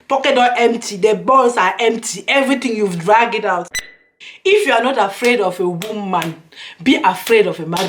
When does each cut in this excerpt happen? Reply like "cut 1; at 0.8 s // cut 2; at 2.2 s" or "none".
cut 1; at 3.9 s